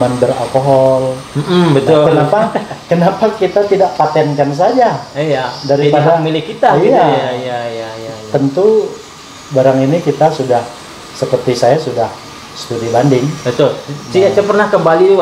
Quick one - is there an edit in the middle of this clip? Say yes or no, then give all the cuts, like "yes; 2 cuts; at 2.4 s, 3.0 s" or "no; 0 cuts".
no; 0 cuts